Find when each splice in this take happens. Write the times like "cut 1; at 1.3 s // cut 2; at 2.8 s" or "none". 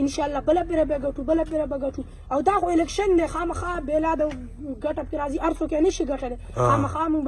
none

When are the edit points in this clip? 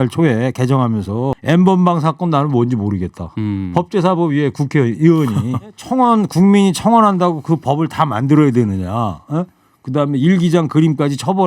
cut 1; at 1.4 s // cut 2; at 5.8 s

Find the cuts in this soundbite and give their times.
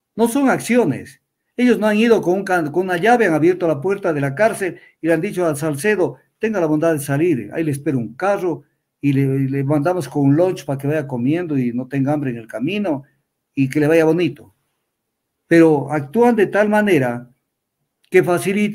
none

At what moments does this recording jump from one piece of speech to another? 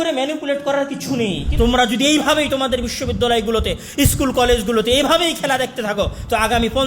cut 1; at 1.4 s

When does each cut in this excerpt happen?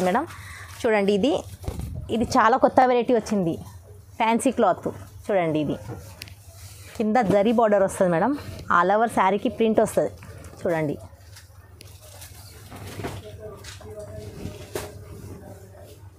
none

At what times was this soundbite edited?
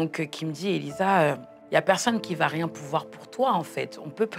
cut 1; at 1.5 s

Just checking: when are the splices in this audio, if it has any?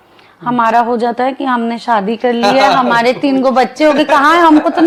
none

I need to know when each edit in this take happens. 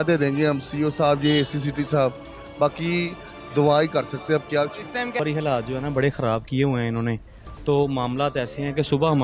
cut 1; at 5.2 s

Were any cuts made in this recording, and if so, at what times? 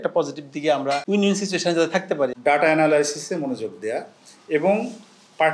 cut 1; at 2.3 s

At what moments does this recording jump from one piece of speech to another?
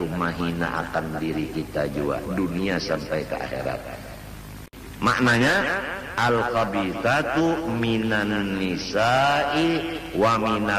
cut 1; at 4.7 s

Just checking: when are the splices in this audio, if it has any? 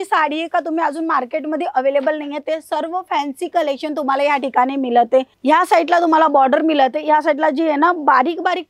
cut 1; at 5.3 s

